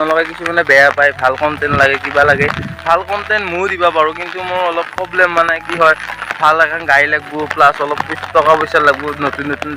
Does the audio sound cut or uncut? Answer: uncut